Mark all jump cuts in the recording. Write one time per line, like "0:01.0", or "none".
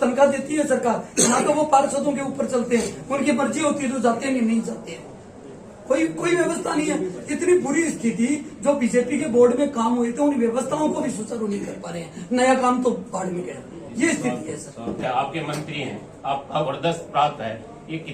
0:15.0